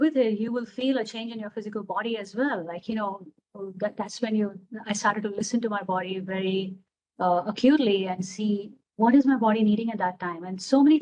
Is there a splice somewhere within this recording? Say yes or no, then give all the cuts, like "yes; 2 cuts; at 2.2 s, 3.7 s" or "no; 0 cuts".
no; 0 cuts